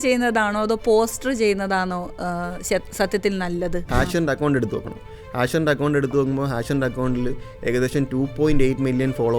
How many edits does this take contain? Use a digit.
1